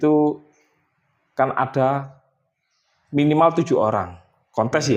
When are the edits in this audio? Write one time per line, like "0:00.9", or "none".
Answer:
none